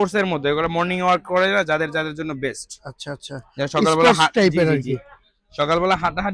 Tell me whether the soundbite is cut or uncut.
uncut